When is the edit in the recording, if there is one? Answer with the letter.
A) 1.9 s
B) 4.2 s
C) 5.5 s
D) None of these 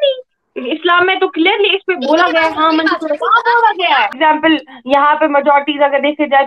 B